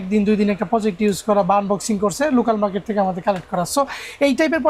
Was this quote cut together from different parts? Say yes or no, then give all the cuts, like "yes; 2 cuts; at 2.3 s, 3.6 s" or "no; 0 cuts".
no; 0 cuts